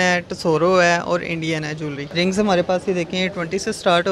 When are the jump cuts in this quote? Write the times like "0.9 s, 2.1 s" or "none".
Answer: 2.0 s